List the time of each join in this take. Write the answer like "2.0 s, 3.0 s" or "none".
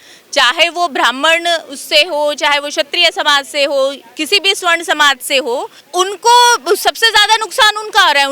5.8 s